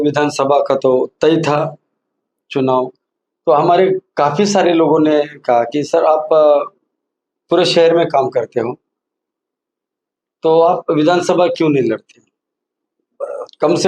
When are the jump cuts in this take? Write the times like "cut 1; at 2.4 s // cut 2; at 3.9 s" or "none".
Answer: none